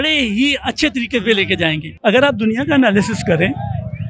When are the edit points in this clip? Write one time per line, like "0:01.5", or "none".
0:01.9